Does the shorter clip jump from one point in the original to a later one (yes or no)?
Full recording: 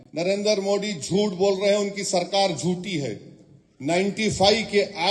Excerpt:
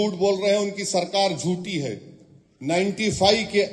no